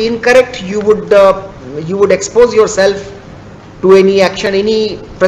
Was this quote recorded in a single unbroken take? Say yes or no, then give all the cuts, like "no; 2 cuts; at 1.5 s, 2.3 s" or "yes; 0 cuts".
yes; 0 cuts